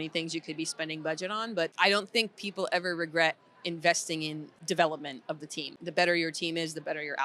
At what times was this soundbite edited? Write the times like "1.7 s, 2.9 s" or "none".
1.7 s, 4.5 s, 5.8 s

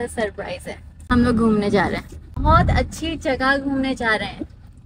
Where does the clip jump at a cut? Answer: 1.0 s, 2.4 s

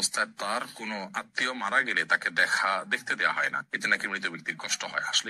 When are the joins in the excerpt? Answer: none

